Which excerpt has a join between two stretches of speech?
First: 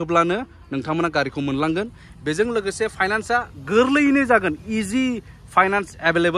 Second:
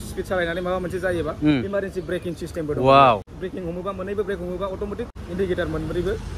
second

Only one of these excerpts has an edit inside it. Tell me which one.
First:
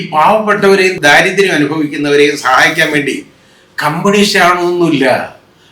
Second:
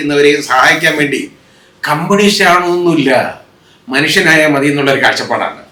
first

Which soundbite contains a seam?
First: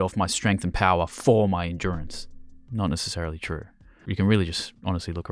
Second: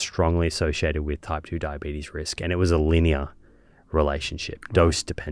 first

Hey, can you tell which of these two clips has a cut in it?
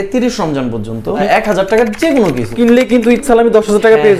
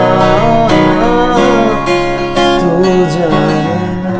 first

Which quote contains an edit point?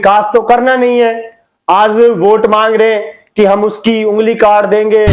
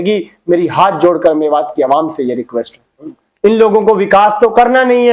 second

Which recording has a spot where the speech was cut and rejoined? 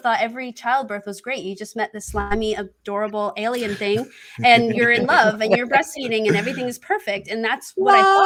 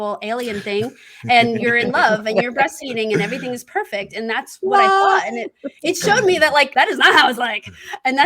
second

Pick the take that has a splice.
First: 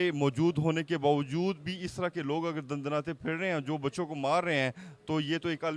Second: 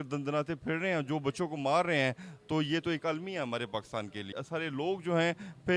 second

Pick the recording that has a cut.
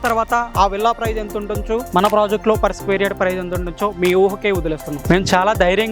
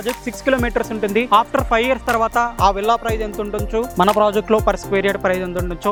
first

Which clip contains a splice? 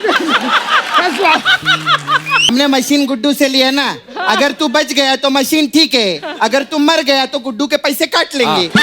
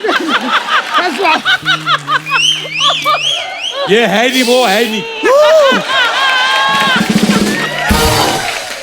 first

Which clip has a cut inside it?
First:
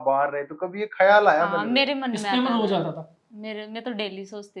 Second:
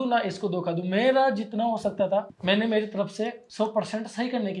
second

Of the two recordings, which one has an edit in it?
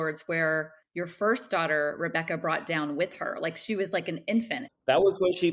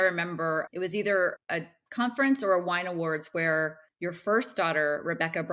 second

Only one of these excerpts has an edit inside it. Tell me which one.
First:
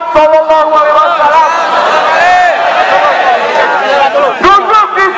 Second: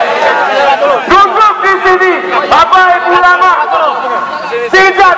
second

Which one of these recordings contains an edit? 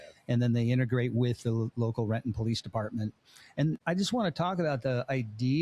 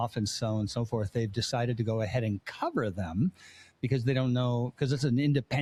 first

